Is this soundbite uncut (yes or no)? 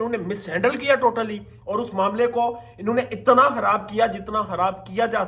yes